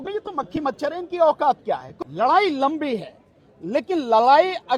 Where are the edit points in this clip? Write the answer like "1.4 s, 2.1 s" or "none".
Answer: 1.9 s